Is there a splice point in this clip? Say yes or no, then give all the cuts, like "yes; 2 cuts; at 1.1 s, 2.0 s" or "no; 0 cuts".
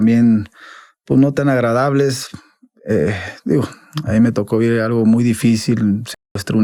no; 0 cuts